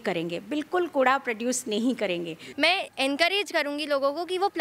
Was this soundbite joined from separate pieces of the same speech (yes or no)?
yes